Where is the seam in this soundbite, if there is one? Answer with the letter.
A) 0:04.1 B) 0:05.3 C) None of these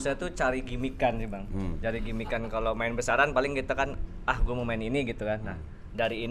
C